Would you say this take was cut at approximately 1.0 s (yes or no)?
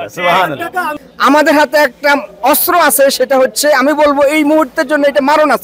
yes